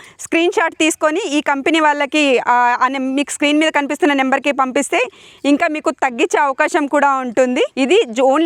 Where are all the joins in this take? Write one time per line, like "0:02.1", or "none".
none